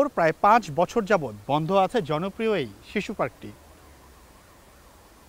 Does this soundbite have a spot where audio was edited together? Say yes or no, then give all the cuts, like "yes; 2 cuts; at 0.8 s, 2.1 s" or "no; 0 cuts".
no; 0 cuts